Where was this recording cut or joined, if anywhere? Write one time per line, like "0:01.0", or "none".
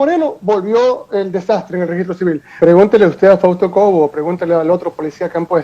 0:02.6